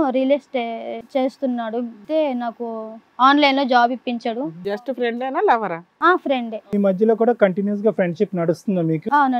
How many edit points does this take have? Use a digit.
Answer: 3